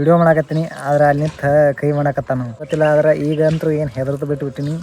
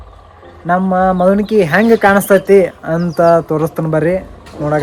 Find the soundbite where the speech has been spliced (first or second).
first